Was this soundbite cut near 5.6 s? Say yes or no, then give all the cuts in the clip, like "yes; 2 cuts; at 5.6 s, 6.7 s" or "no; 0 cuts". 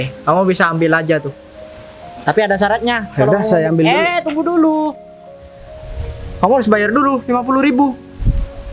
no; 0 cuts